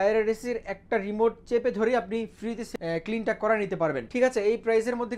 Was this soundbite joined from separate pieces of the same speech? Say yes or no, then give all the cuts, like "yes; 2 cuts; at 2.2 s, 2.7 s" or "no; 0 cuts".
yes; 2 cuts; at 2.6 s, 4.0 s